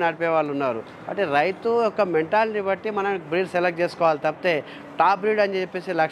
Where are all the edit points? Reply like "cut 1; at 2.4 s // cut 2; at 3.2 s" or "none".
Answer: none